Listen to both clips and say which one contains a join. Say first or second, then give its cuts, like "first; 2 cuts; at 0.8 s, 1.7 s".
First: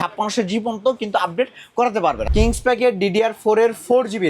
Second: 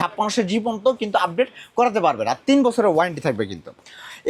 first; 1 cut; at 2.2 s